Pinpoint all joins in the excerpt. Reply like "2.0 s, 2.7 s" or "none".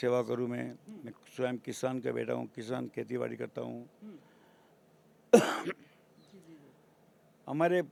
none